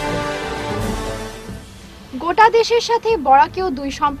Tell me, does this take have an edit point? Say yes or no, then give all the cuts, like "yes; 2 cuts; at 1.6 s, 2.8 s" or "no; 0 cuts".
no; 0 cuts